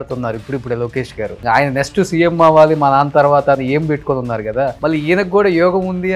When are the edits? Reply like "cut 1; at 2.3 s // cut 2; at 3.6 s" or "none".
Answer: none